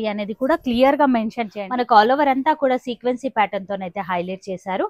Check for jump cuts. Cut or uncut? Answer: cut